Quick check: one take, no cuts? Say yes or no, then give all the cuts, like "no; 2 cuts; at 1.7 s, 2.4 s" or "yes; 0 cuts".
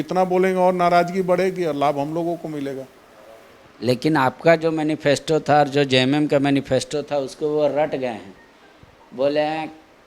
yes; 0 cuts